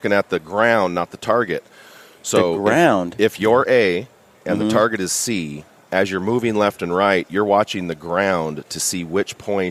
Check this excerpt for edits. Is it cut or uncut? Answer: uncut